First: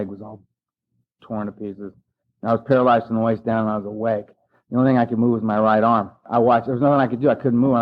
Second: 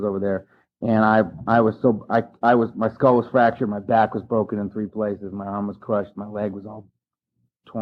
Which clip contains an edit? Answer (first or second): first